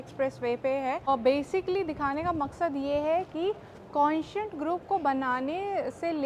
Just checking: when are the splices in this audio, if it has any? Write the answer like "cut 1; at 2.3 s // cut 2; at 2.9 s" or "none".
cut 1; at 1.1 s